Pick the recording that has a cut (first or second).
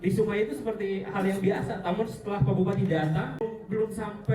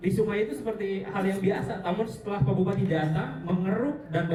first